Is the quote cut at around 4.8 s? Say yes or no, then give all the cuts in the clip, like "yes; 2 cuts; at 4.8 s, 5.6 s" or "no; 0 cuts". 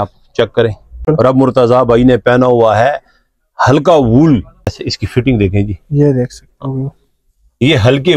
yes; 2 cuts; at 1.0 s, 4.8 s